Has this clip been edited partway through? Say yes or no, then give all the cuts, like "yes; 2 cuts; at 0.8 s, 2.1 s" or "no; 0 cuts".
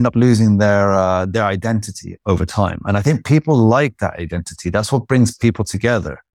no; 0 cuts